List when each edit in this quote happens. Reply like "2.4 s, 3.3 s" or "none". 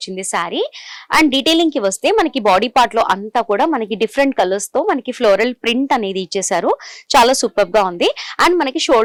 none

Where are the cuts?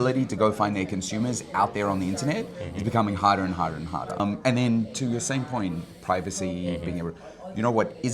4.2 s

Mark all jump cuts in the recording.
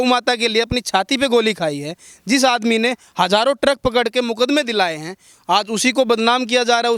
none

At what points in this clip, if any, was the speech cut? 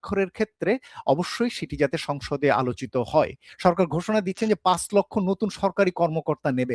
3.4 s

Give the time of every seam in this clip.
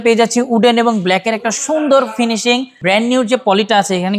2.8 s

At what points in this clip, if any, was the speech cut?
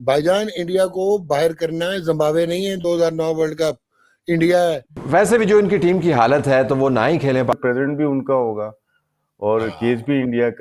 5.0 s, 7.5 s

